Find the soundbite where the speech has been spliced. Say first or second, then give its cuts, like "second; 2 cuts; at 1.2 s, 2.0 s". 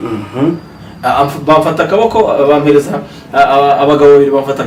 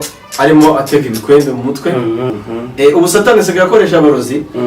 second; 1 cut; at 2.3 s